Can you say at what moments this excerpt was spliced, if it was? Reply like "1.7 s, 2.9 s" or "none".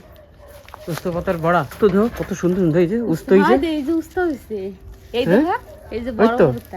1.7 s